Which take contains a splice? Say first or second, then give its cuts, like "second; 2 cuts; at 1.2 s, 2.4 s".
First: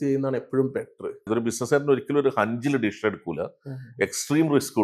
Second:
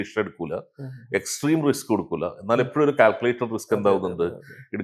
first; 1 cut; at 1.3 s